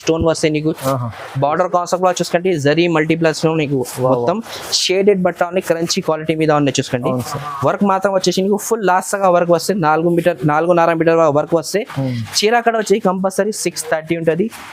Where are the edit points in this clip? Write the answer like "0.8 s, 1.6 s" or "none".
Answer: none